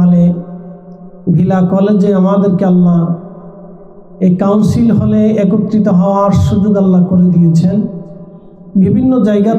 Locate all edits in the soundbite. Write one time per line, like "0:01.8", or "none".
none